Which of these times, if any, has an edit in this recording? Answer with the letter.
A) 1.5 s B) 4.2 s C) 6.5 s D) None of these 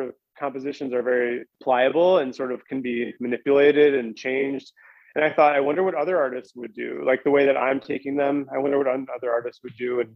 A